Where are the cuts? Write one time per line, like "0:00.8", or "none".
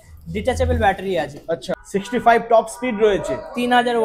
0:01.8